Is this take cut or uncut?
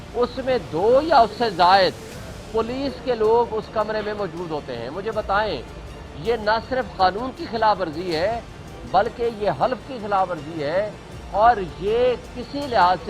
uncut